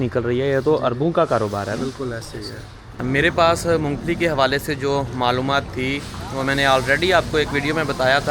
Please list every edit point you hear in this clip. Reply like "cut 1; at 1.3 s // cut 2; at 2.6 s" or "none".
cut 1; at 2.9 s